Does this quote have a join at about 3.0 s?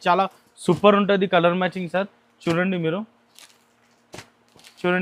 no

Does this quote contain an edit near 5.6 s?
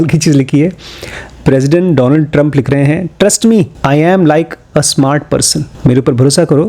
yes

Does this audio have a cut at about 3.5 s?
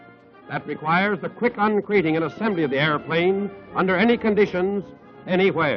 yes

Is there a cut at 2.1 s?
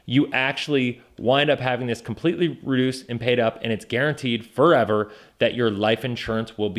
no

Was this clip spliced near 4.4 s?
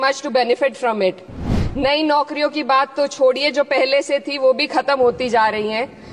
no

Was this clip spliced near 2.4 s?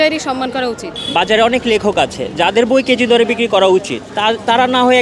no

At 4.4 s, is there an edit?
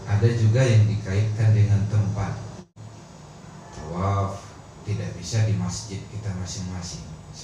no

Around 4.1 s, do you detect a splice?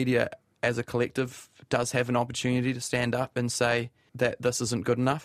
yes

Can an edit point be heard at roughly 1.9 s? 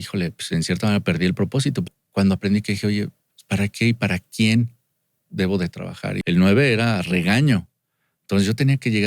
yes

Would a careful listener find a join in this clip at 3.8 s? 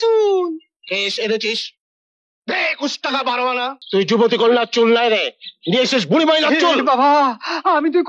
yes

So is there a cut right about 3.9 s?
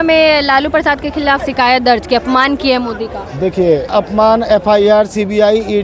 yes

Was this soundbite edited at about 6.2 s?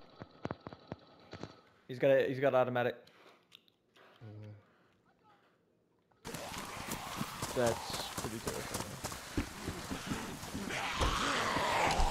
yes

